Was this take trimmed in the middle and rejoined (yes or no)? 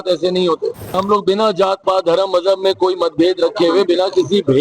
yes